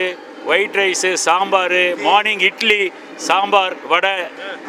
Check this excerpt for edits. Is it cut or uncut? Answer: uncut